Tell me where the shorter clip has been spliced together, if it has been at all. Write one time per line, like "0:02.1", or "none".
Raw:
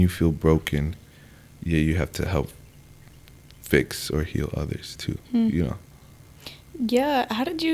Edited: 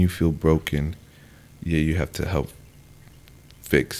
none

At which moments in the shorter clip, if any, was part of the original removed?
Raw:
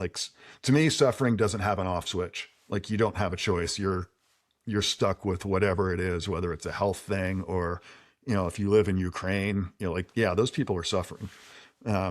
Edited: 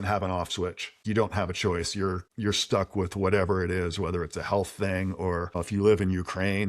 0:01.0
0:02.3
0:05.6

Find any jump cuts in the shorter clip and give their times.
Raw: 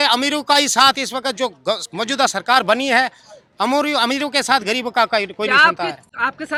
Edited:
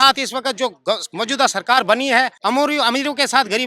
0:02.4

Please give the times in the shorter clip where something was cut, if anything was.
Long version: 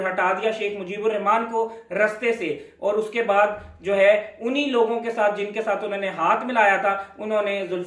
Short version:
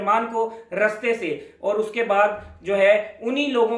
none

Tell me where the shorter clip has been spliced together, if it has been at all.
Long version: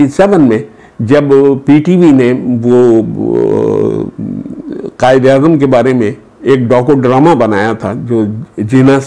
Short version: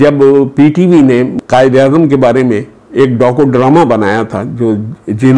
0:01.4

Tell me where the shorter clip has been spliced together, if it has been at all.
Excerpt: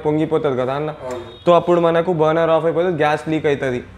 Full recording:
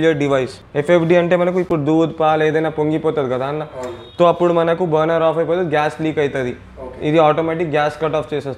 none

